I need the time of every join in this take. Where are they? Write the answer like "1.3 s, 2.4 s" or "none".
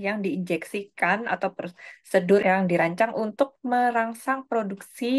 2.4 s

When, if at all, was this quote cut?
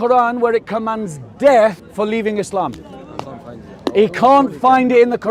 1.8 s

